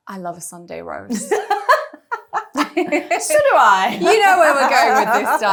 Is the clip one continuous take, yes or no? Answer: yes